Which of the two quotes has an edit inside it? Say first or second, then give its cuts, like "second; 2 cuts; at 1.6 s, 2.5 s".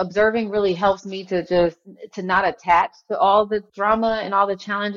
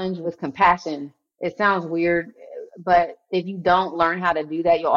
first; 1 cut; at 3.7 s